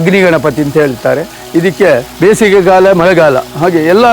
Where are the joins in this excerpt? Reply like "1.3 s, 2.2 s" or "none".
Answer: 2.1 s